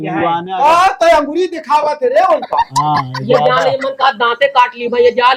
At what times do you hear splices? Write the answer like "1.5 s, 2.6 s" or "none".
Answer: none

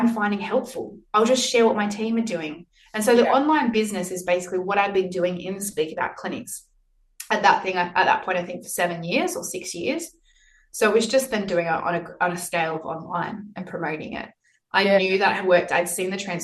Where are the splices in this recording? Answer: none

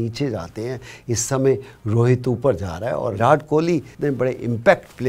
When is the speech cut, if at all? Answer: 3.1 s, 3.9 s

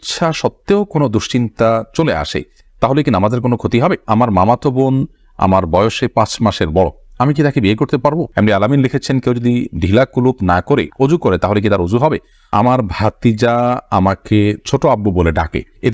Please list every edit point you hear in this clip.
4.0 s, 8.3 s, 12.5 s

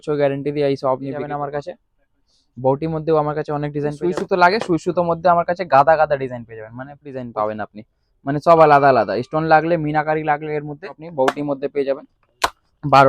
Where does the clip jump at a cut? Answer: 1.3 s, 4.0 s, 7.3 s, 11.0 s

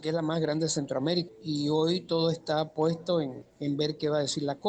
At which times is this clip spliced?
1.3 s, 3.4 s

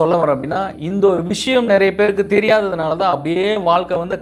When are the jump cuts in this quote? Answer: none

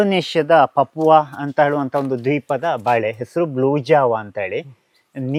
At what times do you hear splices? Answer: none

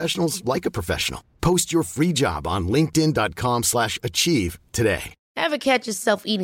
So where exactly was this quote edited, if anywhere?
5.2 s

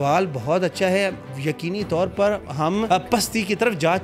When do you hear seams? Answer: 2.9 s

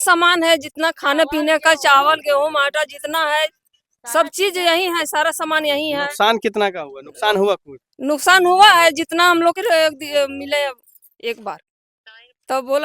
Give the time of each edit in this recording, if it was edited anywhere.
9.6 s

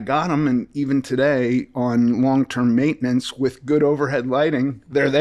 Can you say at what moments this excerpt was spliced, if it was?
none

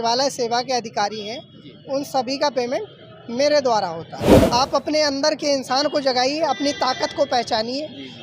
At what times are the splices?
4.3 s

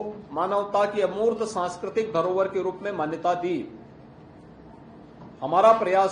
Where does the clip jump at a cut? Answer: none

